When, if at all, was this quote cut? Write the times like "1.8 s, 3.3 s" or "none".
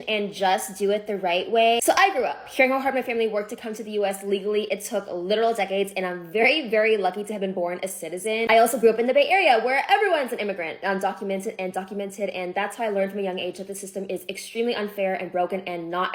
none